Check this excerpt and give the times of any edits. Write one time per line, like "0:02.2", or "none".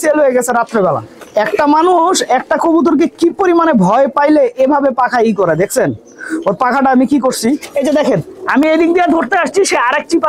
0:01.1
0:07.8